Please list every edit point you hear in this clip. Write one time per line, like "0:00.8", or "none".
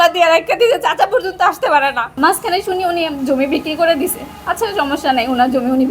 0:02.1